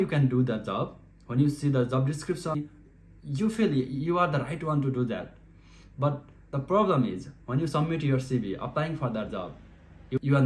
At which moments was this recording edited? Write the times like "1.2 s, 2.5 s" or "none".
2.5 s